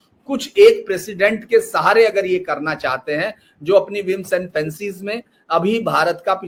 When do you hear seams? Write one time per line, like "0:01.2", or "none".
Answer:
none